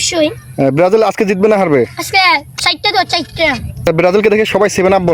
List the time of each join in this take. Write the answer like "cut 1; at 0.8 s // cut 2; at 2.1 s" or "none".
cut 1; at 3.9 s